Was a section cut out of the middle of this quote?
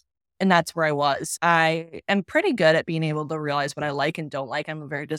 no; 0 cuts

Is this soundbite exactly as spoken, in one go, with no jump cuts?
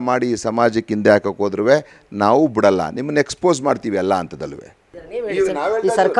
yes; 0 cuts

